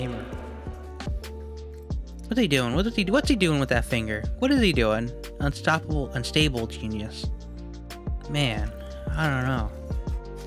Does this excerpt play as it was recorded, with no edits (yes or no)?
no